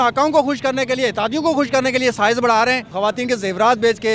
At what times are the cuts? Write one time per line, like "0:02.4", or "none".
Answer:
0:02.9